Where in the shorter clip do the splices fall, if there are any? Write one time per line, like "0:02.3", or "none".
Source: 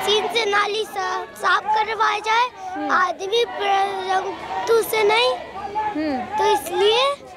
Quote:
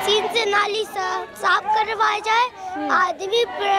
none